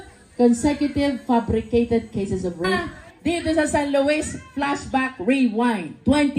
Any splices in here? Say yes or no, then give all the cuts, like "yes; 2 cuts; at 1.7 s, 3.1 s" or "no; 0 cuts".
yes; 1 cut; at 2.8 s